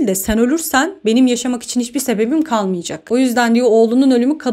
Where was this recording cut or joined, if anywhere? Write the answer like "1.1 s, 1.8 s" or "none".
none